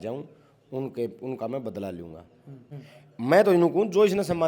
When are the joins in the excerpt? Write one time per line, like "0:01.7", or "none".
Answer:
0:02.6